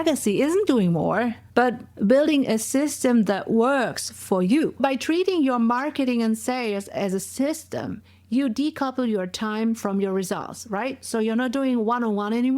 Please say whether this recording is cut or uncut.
cut